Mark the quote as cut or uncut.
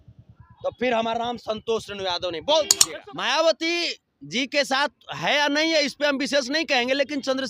cut